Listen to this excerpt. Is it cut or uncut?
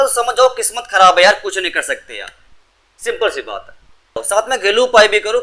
cut